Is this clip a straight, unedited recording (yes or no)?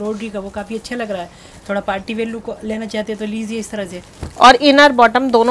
yes